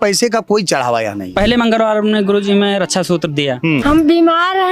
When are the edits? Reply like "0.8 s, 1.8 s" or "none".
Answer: 1.3 s, 3.8 s